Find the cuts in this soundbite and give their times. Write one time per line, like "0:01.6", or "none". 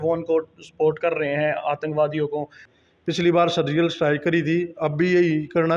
0:02.7